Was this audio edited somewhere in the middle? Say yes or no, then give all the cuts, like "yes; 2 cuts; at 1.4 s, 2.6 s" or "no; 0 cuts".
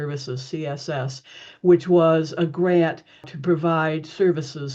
no; 0 cuts